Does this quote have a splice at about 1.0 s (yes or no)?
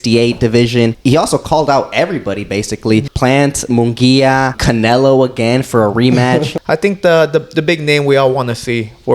yes